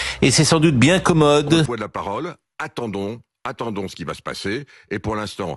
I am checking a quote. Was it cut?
yes; 1 cut; at 1.7 s

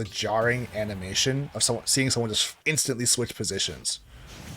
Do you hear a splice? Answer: yes; 1 cut; at 2.5 s

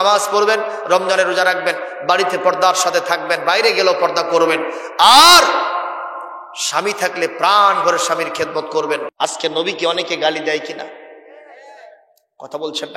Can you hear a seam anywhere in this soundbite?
yes; 1 cut; at 9.1 s

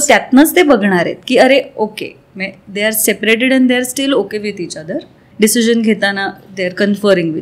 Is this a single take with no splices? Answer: no; 1 cut; at 5.2 s

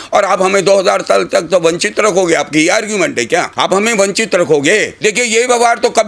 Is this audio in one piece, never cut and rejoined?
no; 2 cuts; at 3.5 s, 4.9 s

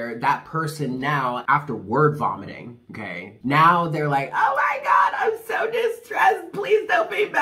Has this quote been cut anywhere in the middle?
yes; 2 cuts; at 1.4 s, 3.3 s

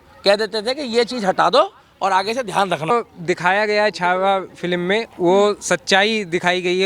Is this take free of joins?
no; 1 cut; at 2.9 s

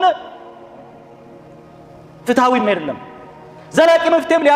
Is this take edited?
no; 0 cuts

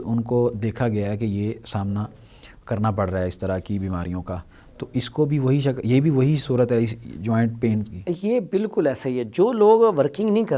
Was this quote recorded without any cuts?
yes; 0 cuts

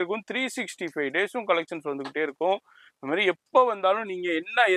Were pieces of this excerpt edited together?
no; 0 cuts

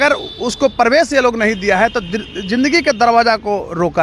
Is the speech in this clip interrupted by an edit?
no; 0 cuts

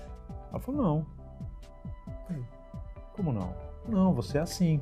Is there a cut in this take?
no; 0 cuts

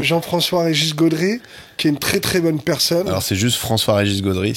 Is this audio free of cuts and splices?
yes; 0 cuts

